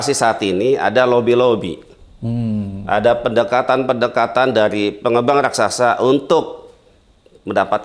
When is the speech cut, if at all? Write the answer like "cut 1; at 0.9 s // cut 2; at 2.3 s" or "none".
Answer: none